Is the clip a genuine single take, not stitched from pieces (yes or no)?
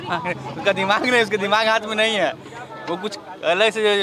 yes